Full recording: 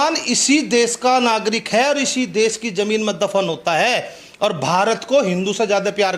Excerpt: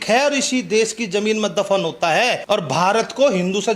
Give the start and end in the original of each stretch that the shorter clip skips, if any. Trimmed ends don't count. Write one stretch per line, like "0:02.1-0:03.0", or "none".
0:04.0-0:04.3